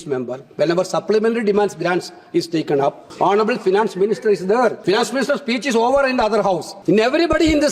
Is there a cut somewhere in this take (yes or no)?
yes